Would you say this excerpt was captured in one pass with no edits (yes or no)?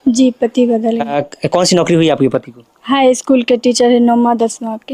yes